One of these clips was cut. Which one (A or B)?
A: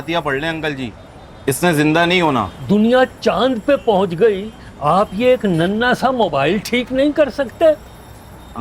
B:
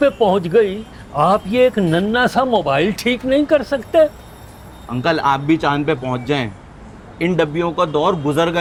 A